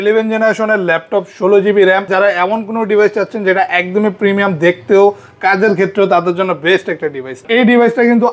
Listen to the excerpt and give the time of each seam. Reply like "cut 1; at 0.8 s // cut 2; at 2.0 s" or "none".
cut 1; at 2.1 s // cut 2; at 7.4 s